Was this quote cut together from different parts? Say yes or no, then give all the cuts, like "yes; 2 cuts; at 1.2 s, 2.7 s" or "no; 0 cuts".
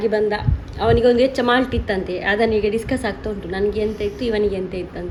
no; 0 cuts